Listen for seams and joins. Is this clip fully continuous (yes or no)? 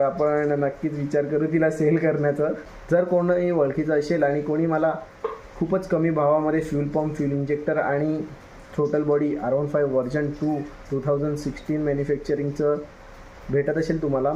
no